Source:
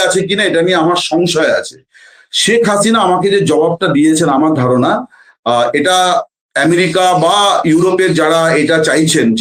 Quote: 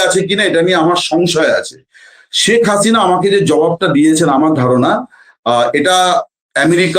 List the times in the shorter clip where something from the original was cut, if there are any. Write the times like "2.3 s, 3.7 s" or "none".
none

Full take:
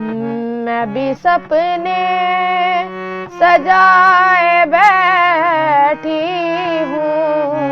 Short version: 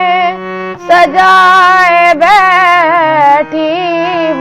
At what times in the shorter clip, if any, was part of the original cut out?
none

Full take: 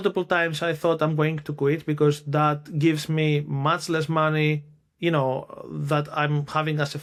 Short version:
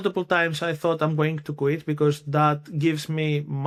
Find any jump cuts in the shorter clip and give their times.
none

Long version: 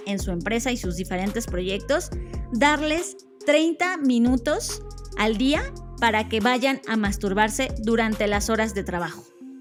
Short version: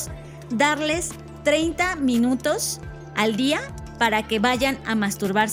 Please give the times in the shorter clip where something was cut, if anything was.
none

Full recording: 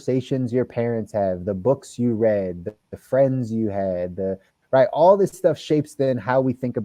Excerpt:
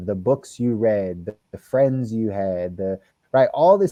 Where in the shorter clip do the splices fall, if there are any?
none

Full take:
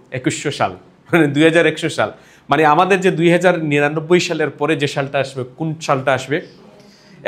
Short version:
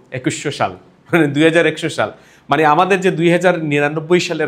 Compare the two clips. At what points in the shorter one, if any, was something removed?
none

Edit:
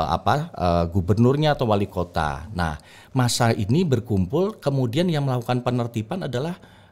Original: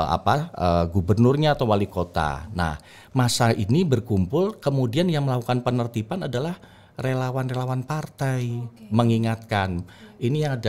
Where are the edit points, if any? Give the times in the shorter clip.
none

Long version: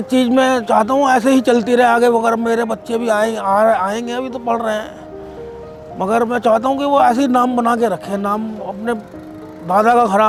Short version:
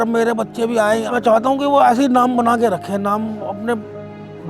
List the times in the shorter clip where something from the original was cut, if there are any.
1.1 s

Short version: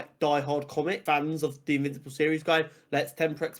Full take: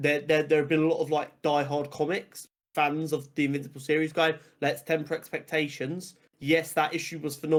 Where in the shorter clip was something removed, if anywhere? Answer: 1.0 s

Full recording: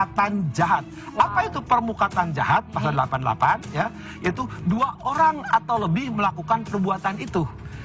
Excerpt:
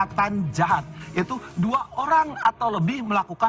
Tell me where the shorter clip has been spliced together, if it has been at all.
1.0 s

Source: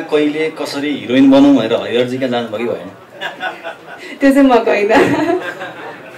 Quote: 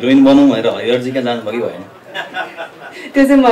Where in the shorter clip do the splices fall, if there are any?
none

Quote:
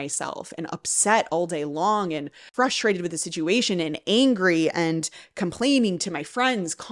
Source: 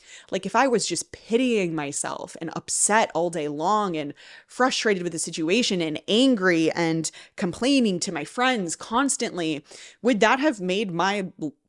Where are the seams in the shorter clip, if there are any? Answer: 2.4 s

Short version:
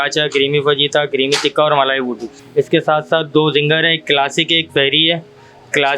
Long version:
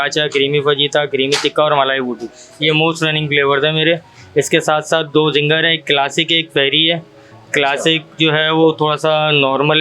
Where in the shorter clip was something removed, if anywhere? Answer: 2.4 s

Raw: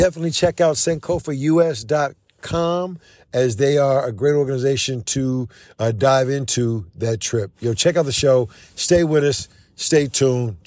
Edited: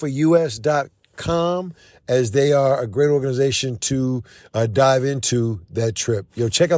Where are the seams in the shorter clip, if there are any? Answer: none

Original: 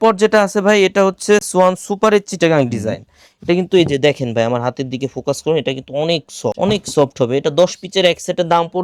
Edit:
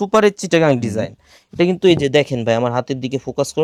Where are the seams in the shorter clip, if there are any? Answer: none

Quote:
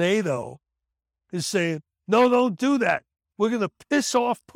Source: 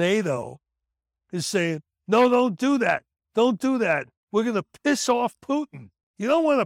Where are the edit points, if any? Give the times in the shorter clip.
3.2 s

